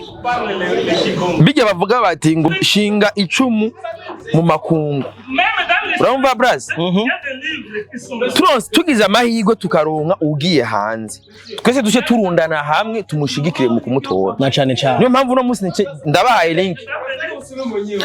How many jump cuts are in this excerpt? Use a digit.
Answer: 1